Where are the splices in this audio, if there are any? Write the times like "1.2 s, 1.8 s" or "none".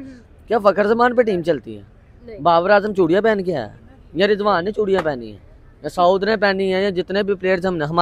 none